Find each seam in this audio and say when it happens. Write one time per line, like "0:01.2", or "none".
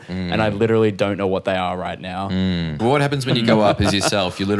0:02.8